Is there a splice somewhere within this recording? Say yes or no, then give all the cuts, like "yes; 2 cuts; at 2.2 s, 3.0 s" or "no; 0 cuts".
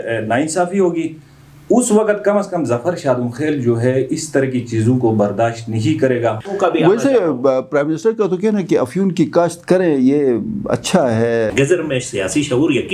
yes; 2 cuts; at 6.4 s, 11.5 s